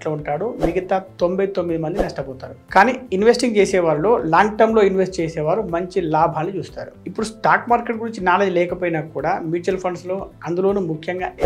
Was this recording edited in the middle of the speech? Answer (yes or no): no